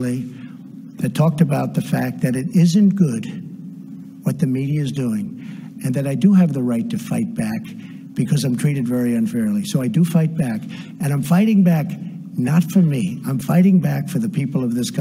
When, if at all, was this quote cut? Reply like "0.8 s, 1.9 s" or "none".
none